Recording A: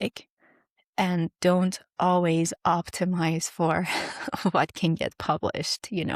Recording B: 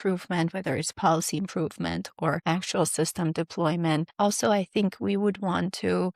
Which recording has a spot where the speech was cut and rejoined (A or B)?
B